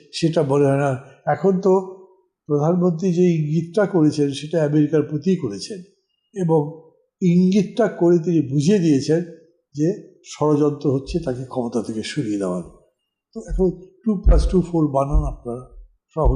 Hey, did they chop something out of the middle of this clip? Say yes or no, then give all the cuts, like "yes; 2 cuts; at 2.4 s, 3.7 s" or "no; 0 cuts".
no; 0 cuts